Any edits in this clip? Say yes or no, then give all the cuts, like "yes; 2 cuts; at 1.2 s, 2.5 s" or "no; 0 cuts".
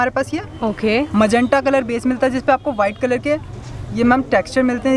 no; 0 cuts